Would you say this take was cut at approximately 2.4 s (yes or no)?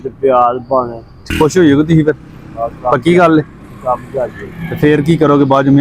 no